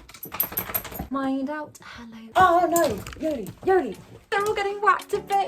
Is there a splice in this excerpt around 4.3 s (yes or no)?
yes